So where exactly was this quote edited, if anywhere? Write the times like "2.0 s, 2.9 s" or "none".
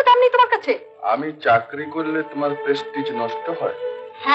none